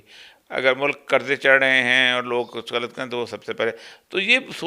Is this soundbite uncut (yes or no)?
yes